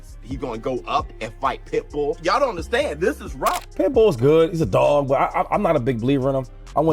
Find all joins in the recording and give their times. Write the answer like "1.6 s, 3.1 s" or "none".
3.6 s